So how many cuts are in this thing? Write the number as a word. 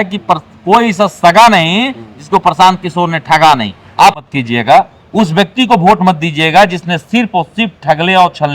one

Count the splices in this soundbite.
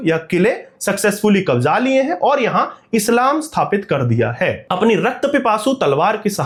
zero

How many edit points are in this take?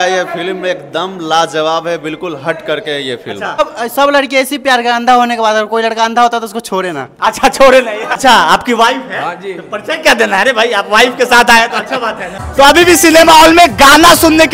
three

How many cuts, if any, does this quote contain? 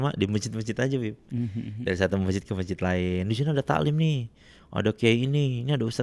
zero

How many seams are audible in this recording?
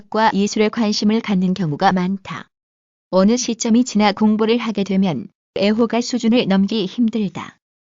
one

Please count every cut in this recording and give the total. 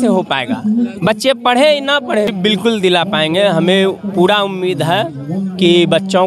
one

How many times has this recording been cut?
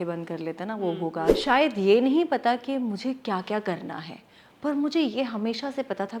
one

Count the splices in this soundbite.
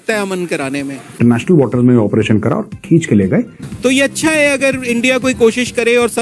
two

